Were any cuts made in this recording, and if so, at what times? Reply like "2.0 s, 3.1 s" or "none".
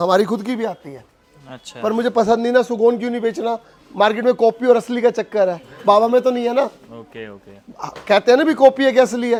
none